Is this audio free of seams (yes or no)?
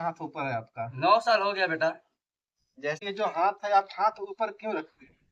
no